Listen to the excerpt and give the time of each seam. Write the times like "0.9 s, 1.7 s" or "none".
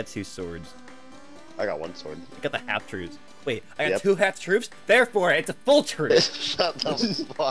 none